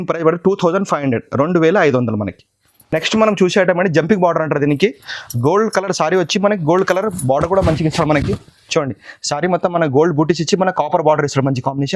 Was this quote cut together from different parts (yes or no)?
no